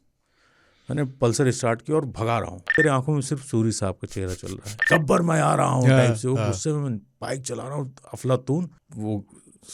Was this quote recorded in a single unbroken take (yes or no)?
no